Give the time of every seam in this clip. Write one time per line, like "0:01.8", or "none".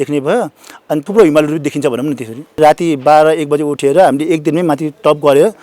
0:02.5

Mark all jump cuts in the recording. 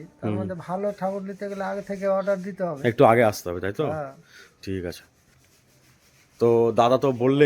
none

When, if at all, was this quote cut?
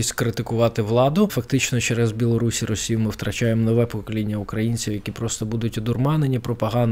0:01.4

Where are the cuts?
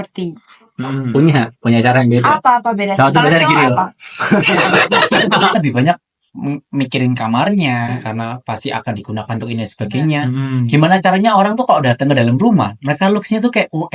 0:05.5

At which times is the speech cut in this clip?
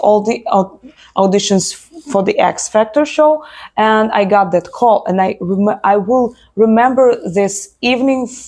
none

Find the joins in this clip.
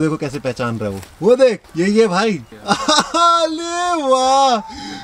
0:01.6
0:02.5

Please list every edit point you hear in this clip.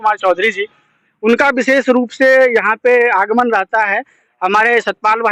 none

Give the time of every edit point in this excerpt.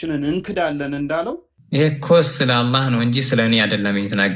0:01.5

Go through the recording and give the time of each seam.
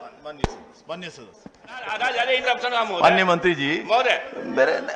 0:01.9

